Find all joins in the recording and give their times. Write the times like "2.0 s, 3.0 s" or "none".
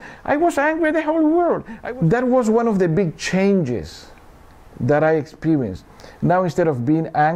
1.7 s